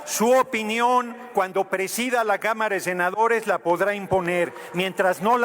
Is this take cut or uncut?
uncut